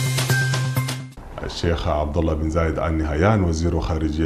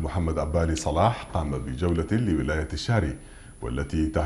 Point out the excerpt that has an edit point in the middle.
first; 1 cut; at 1.0 s

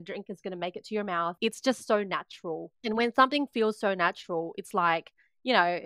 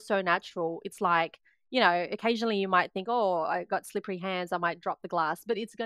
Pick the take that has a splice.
first; 2 cuts; at 1.4 s, 2.7 s

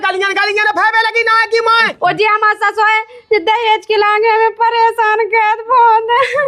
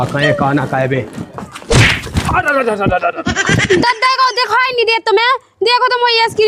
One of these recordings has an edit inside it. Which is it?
first; 1 cut; at 1.9 s

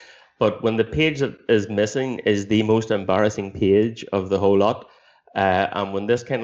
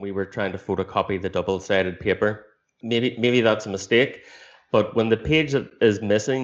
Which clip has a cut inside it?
second; 1 cut; at 2.7 s

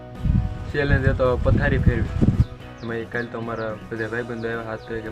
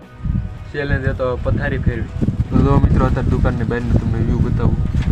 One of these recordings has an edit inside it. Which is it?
first; 1 cut; at 2.4 s

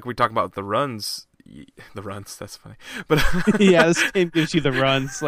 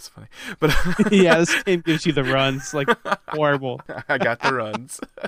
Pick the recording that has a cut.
second; 1 cut; at 3.9 s

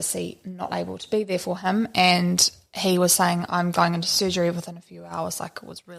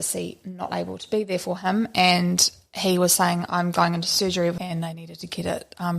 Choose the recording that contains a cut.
second; 1 cut; at 4.6 s

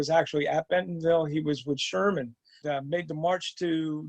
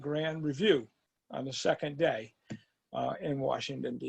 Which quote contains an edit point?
first; 1 cut; at 2.5 s

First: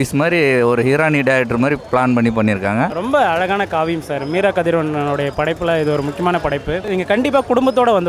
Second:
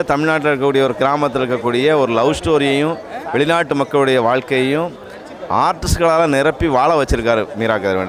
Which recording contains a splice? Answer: first; 2 cuts; at 2.9 s, 6.8 s

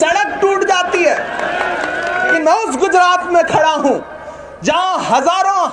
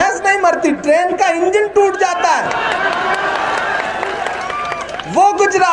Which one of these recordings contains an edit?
first; 1 cut; at 2.3 s

